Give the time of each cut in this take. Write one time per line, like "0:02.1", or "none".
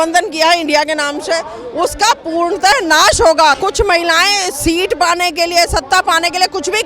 0:03.6